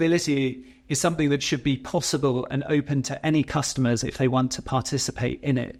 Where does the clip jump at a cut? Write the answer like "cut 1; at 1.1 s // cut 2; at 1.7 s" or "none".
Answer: none